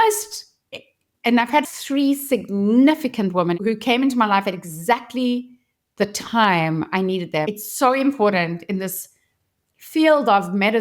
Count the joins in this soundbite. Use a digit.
3